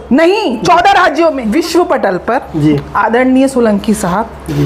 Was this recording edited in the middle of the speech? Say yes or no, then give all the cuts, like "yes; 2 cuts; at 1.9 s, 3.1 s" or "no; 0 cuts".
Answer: yes; 1 cut; at 1.4 s